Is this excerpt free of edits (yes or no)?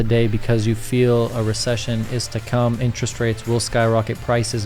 yes